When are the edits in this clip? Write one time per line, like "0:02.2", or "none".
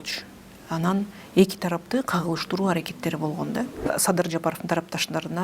0:03.8